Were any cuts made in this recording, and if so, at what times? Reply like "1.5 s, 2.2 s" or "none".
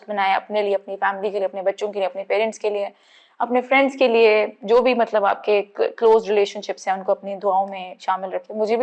none